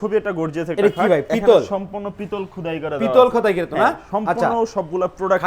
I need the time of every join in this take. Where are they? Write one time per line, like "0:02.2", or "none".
none